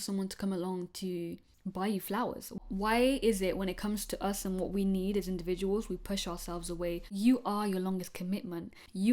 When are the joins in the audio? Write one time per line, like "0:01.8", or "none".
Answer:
0:02.6
0:07.1